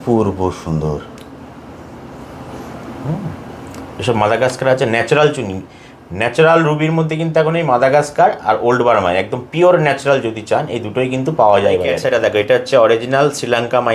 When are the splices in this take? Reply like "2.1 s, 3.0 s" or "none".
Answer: 12.0 s